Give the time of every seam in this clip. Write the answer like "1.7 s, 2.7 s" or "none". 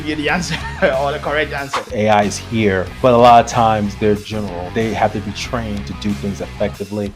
1.9 s, 4.7 s